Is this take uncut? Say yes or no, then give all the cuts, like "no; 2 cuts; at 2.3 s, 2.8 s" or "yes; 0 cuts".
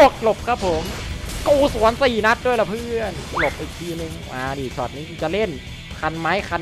yes; 0 cuts